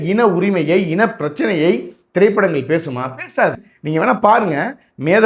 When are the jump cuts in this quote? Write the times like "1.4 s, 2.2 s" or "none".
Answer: 3.7 s